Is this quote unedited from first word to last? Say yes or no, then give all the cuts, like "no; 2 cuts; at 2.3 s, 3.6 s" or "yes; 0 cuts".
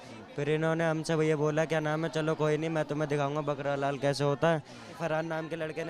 no; 1 cut; at 4.9 s